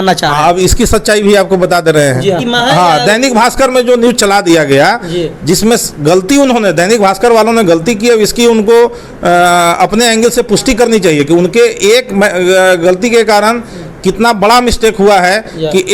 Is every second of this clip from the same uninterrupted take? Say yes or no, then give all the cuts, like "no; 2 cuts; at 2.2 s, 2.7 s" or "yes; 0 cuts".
no; 1 cut; at 2.4 s